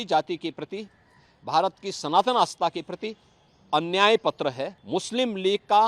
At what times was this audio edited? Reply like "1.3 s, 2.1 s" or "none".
4.7 s